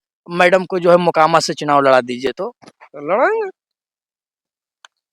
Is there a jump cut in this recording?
no; 0 cuts

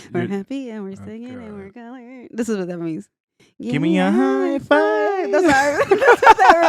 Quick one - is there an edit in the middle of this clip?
no; 0 cuts

